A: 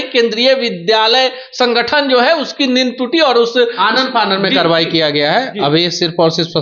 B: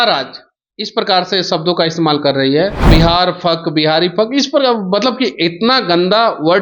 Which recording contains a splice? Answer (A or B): B